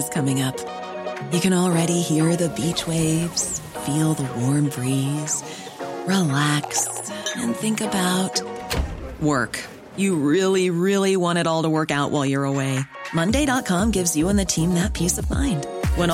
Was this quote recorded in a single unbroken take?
yes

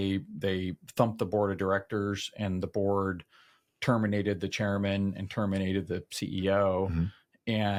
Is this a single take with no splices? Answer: yes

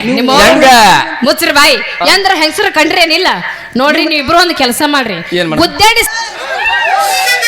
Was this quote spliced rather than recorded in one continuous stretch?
yes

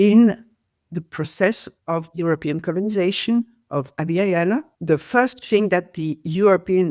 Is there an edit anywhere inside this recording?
yes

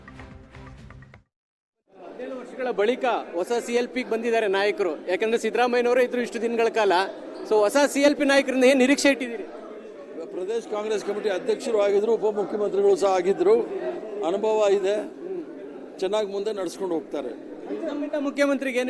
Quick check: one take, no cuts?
no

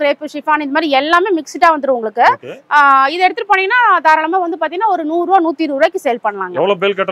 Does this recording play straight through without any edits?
yes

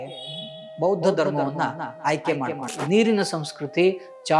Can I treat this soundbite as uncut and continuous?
no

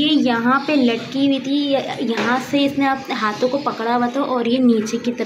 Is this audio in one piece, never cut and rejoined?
yes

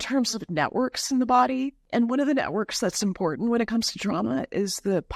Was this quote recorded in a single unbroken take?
no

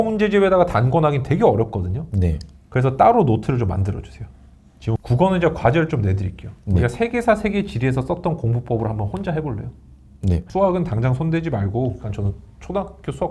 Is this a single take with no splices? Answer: no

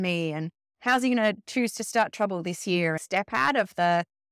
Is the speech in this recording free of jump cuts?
no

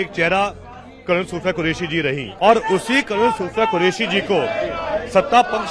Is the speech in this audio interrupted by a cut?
yes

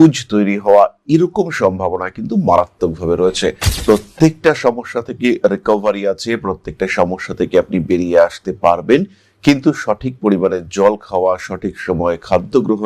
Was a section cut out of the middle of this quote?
yes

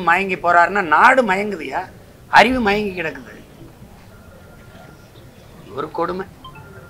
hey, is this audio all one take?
yes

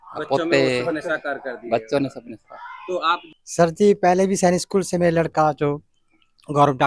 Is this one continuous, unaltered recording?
no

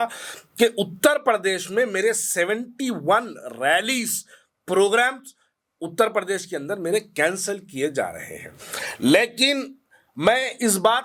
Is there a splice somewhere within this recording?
no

